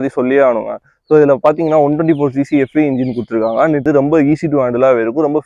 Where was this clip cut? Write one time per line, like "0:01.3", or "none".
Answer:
0:03.8

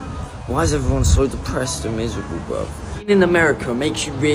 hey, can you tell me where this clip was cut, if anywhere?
0:03.1

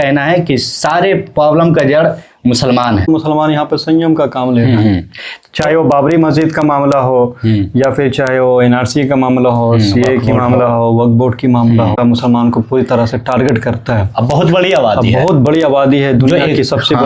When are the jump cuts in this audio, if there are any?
0:03.1
0:11.9

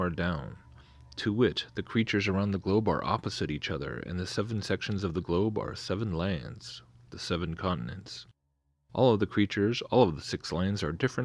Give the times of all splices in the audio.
0:01.1

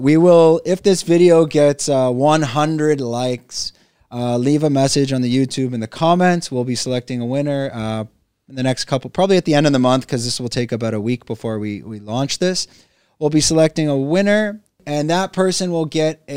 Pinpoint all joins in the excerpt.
0:14.8

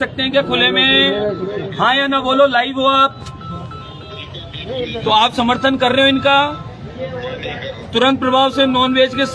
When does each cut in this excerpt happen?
none

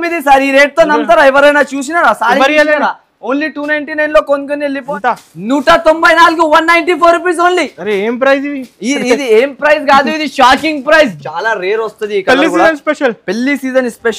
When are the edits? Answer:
0:04.8
0:11.1

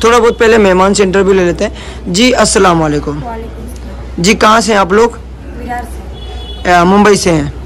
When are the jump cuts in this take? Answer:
none

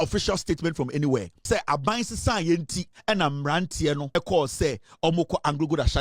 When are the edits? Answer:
0:01.3
0:02.9
0:04.1

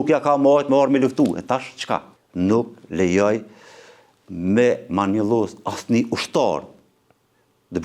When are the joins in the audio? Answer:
0:02.2

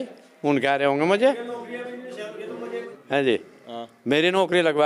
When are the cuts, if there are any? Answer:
0:02.9

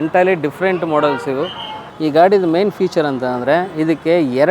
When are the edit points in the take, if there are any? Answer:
0:01.8

